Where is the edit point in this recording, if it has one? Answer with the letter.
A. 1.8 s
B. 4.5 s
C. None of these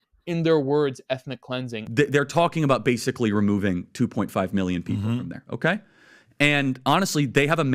A